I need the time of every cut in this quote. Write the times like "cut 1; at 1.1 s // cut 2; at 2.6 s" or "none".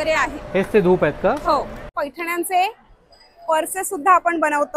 cut 1; at 1.9 s